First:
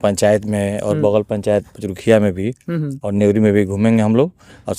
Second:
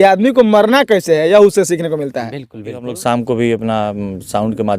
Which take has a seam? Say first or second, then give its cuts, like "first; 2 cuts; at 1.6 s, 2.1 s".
second; 1 cut; at 2.9 s